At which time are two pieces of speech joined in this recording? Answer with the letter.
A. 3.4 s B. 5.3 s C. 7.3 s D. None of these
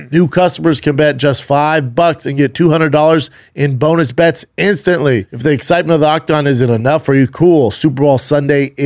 B